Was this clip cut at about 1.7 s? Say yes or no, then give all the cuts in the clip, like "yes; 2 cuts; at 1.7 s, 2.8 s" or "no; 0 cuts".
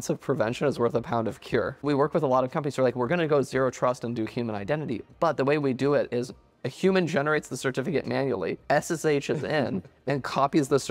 yes; 1 cut; at 1.7 s